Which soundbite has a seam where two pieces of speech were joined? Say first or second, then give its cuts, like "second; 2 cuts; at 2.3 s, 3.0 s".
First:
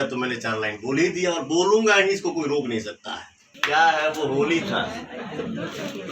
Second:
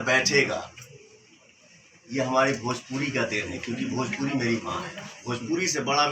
first; 1 cut; at 3.5 s